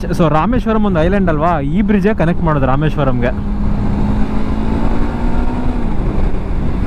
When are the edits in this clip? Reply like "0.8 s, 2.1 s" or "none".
none